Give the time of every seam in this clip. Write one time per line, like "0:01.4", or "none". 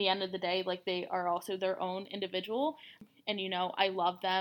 0:03.0